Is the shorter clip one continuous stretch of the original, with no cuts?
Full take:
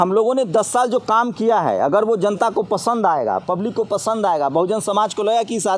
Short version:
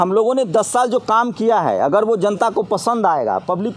yes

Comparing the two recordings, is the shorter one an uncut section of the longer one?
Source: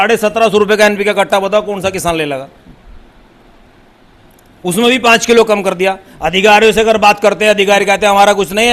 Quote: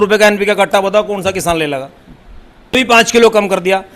no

